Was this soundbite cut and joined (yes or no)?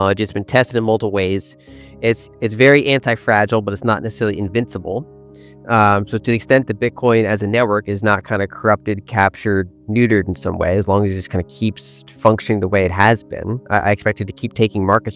no